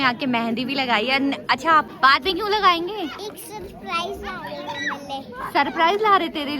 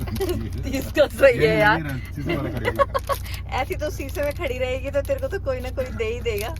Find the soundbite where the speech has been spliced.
first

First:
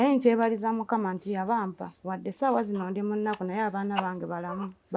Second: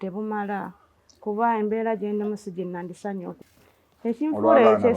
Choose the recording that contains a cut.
second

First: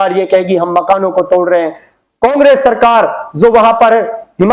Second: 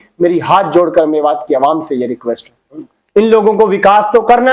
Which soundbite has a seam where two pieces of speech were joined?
second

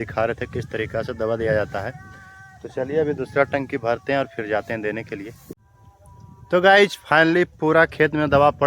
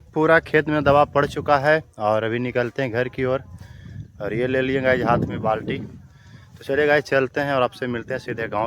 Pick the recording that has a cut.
first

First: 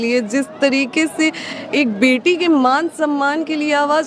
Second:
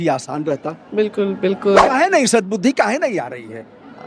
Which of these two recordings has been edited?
second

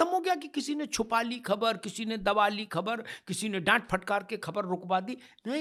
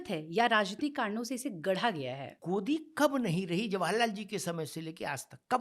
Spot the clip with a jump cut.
second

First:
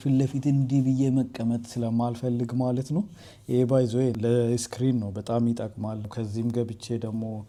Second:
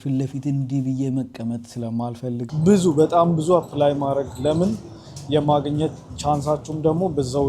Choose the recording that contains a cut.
second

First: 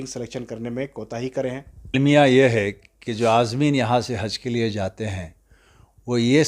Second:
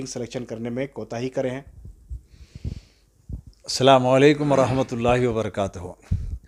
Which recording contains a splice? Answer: first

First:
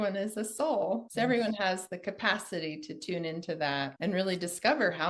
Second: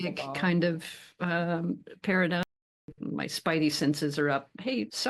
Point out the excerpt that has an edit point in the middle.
second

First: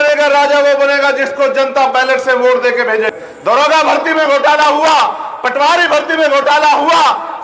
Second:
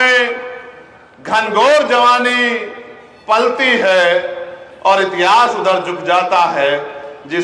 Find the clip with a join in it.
first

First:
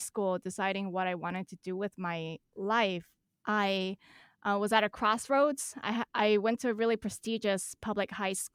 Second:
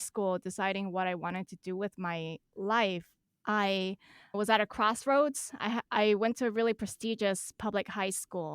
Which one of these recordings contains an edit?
second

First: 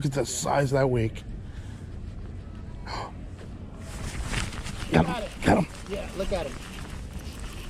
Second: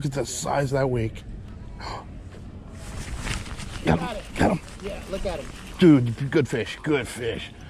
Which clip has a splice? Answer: second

